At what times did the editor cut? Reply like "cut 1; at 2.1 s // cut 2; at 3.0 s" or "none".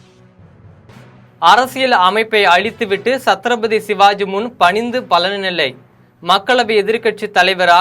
cut 1; at 1.3 s